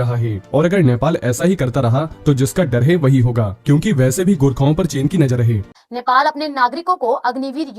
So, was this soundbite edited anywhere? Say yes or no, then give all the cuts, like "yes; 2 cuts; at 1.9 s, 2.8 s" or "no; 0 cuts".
yes; 1 cut; at 5.7 s